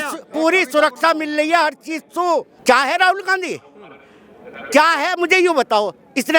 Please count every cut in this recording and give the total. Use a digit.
1